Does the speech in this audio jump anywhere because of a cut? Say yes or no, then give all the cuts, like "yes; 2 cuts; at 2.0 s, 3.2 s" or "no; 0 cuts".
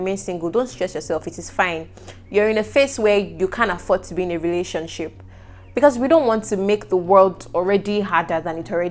no; 0 cuts